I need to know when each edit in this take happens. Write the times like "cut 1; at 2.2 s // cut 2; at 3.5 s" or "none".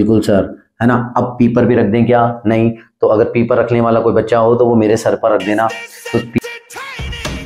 cut 1; at 6.4 s